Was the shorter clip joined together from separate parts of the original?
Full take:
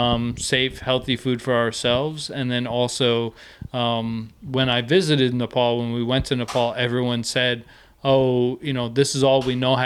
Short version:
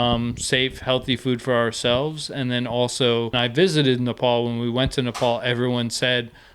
yes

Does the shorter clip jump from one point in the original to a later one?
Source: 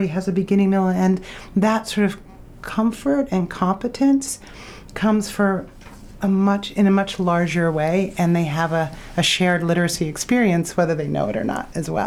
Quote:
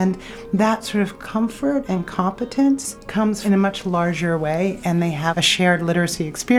yes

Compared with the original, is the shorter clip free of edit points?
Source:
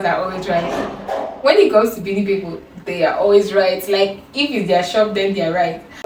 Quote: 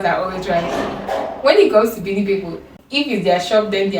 no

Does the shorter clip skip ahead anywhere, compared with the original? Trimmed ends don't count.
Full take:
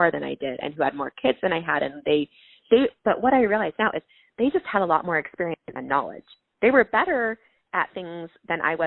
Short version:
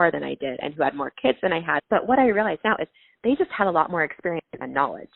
yes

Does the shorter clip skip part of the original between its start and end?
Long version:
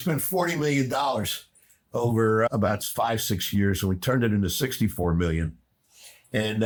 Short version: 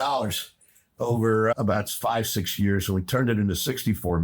no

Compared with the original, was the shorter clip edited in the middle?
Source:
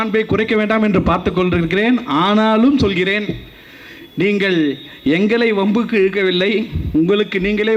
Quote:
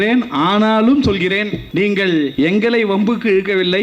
yes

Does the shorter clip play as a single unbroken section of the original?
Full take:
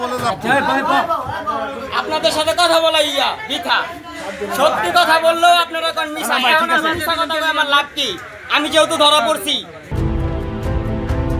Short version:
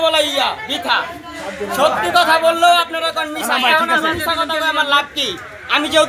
yes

